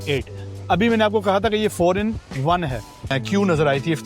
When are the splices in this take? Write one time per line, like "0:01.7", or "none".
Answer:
0:03.1